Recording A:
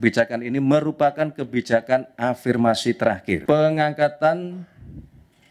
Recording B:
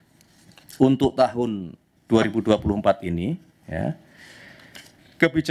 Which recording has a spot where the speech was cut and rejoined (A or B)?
A